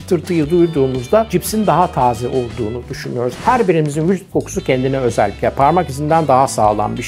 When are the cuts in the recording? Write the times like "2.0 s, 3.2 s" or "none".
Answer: 3.4 s